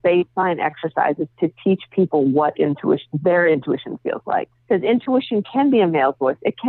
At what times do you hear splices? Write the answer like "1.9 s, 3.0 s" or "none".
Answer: 4.5 s